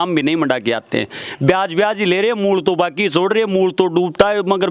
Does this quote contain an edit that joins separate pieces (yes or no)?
no